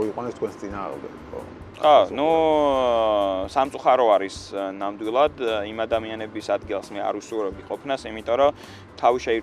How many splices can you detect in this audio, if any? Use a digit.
0